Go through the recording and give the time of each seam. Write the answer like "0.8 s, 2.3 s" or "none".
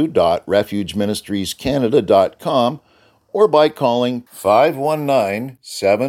none